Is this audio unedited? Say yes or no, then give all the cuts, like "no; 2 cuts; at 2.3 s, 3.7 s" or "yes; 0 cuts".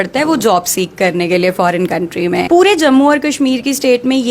no; 1 cut; at 2.4 s